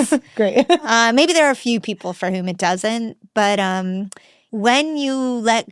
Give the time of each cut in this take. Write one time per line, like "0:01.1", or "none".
0:04.4